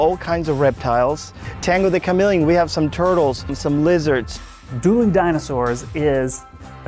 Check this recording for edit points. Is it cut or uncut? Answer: cut